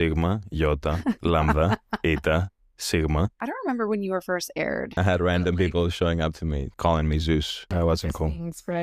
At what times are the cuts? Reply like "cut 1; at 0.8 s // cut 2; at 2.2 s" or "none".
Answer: cut 1; at 3.4 s // cut 2; at 5.0 s // cut 3; at 6.7 s // cut 4; at 7.7 s